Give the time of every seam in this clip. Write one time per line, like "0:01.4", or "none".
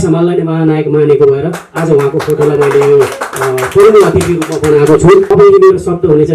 0:05.3

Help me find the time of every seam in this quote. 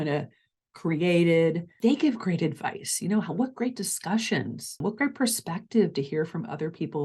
0:01.7
0:04.8

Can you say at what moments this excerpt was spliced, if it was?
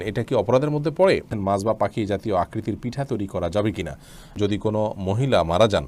0:01.3
0:04.4

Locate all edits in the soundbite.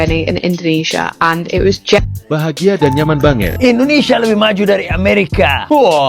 0:03.5

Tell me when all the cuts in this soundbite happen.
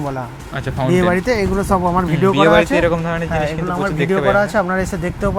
none

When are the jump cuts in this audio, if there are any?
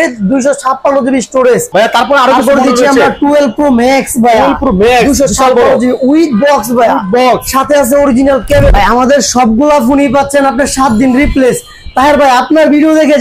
0:01.7
0:08.7

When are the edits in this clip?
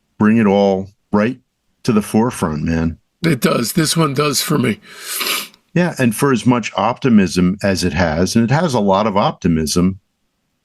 0:00.9

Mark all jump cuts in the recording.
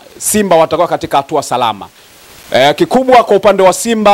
none

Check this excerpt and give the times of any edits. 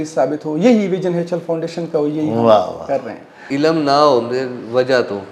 0:03.5

